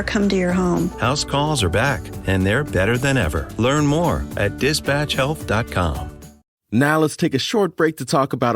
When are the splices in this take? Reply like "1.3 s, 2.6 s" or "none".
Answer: 6.4 s